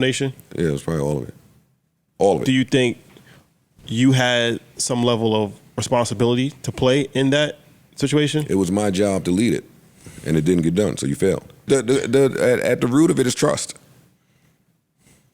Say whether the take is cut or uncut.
cut